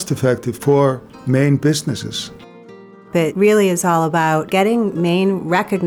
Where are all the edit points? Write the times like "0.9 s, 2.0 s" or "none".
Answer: 1.1 s, 3.0 s, 4.5 s

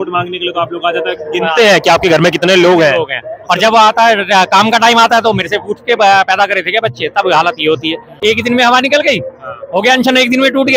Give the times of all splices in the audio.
8.1 s

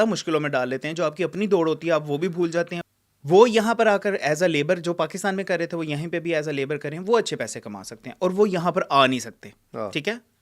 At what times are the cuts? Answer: 2.8 s

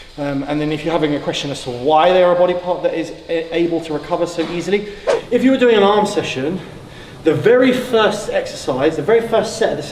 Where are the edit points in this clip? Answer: 5.1 s

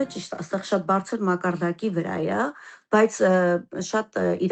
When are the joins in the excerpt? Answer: none

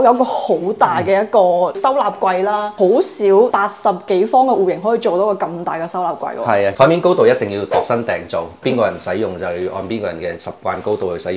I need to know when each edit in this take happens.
1.8 s, 2.7 s, 3.5 s, 6.7 s

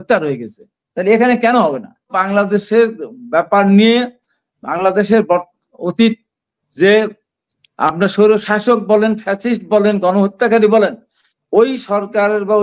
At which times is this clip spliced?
2.2 s

